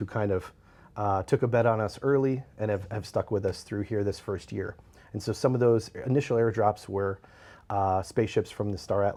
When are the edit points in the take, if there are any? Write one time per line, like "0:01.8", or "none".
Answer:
none

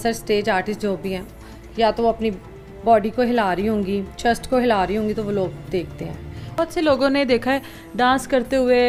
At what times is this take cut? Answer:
none

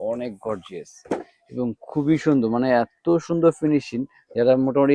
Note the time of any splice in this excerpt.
none

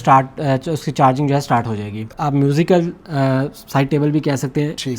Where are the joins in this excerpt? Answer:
0:02.1

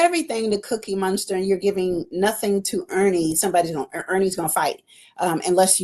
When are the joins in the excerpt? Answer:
none

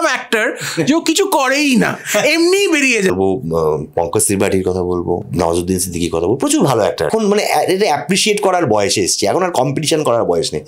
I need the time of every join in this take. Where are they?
0:03.1
0:05.3
0:07.1

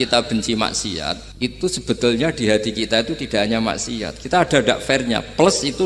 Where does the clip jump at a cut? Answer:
0:01.2

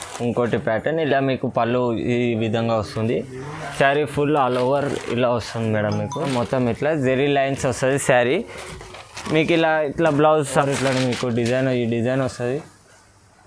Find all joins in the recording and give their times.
0:06.2
0:10.5

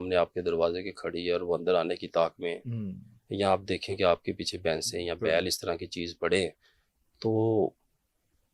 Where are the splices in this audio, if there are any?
none

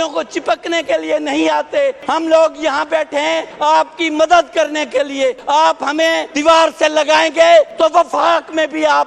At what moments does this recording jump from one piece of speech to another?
0:02.0
0:03.5
0:05.4
0:06.3
0:07.7

